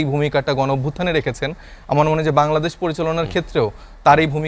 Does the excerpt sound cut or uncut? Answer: uncut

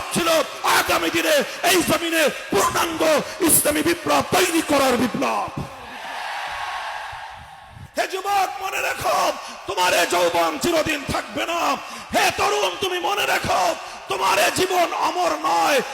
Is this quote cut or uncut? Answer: cut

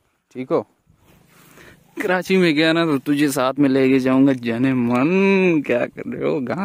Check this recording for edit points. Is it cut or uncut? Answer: cut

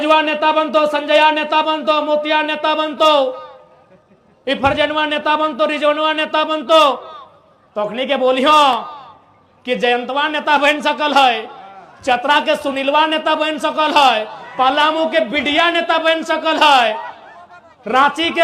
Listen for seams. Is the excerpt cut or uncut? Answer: uncut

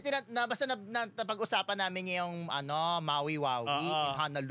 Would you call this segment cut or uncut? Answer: uncut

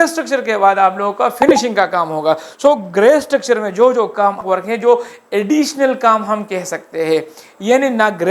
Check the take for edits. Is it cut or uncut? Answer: cut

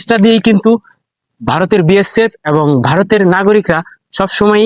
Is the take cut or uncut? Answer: uncut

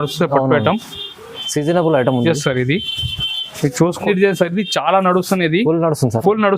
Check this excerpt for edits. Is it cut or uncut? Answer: cut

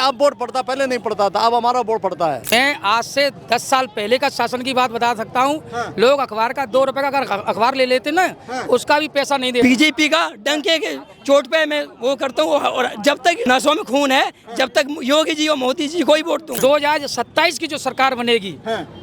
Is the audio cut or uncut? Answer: cut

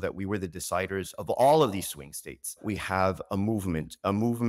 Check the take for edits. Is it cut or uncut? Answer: cut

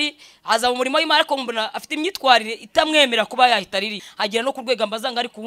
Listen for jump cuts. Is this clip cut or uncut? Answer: cut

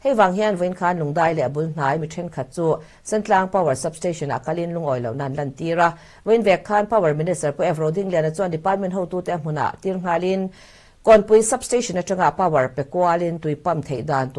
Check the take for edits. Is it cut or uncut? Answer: uncut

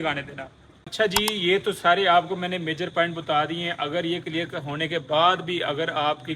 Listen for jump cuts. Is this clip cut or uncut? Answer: cut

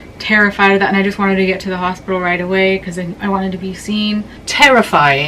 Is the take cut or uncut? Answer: cut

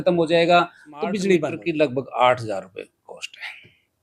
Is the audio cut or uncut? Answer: cut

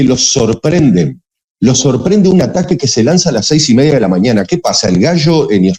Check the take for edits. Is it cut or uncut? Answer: uncut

